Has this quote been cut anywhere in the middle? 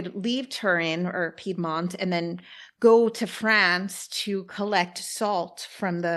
no; 0 cuts

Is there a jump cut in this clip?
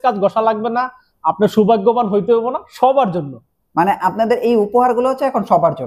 no; 0 cuts

